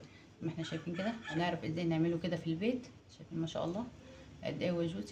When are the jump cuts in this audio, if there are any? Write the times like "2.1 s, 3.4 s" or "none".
0.9 s